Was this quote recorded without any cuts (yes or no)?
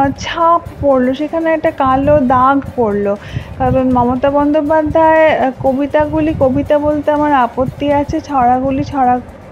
yes